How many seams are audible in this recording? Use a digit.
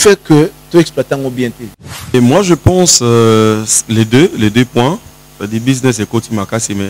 1